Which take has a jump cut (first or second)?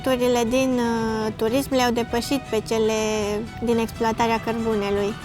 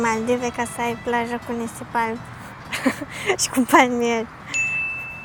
first